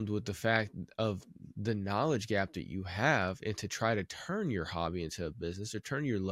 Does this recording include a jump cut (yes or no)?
no